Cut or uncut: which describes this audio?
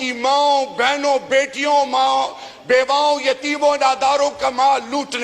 uncut